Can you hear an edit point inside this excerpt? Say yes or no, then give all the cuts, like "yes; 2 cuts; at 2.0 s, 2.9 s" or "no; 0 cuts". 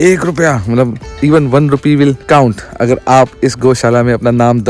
no; 0 cuts